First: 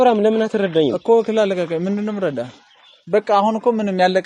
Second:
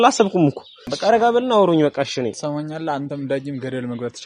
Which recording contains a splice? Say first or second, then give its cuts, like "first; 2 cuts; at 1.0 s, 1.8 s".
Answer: second; 1 cut; at 0.9 s